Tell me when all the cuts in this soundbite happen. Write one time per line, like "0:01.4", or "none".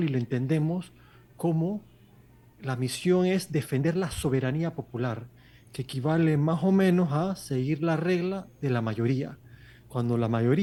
none